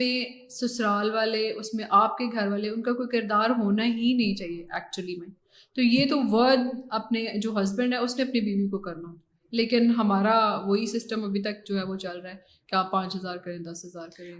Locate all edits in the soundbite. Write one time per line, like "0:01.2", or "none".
none